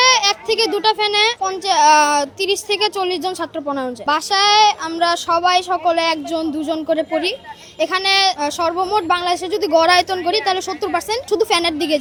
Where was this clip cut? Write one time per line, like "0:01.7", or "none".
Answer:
none

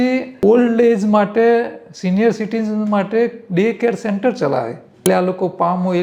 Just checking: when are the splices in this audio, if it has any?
0:04.8

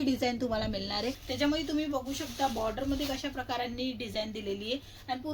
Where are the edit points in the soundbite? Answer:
0:01.2

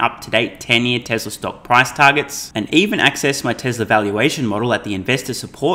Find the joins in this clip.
none

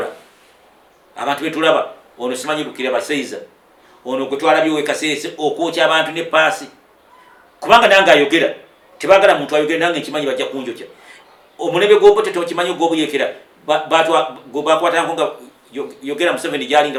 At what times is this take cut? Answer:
none

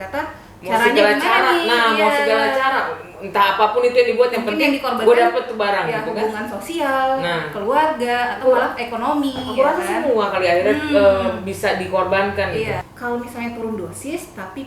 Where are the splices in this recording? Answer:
0:12.9

